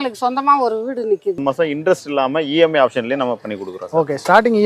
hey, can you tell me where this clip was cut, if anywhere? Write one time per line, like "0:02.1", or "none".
0:01.4